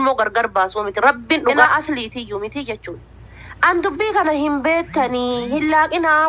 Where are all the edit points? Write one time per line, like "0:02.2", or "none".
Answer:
0:01.6